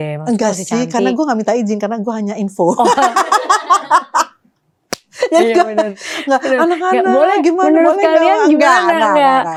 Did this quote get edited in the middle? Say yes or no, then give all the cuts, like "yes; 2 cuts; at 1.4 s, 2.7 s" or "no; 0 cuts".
no; 0 cuts